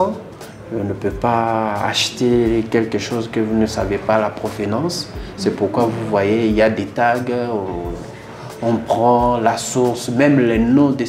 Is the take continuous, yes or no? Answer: yes